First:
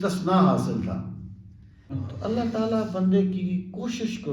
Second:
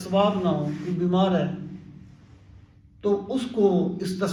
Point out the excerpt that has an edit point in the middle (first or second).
first